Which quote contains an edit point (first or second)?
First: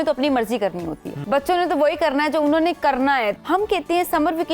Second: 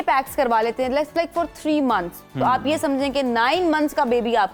first